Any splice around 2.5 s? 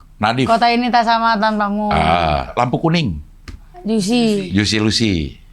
yes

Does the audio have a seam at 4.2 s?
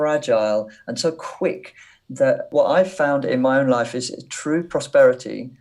no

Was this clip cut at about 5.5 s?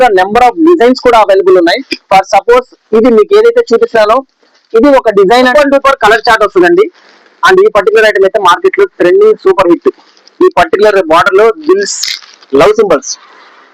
yes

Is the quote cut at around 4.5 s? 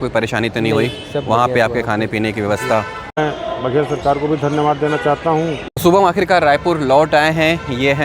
no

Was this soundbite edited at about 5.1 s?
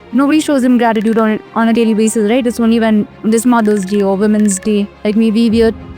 yes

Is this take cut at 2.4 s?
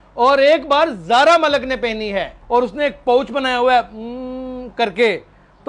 yes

